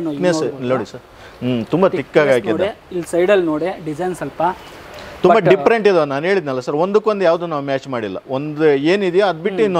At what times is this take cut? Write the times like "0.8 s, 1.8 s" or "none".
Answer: none